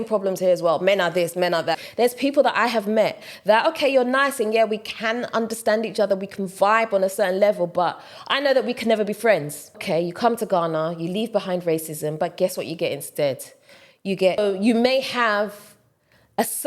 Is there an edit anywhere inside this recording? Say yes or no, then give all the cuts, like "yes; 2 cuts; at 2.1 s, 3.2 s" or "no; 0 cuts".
yes; 3 cuts; at 1.8 s, 9.8 s, 14.4 s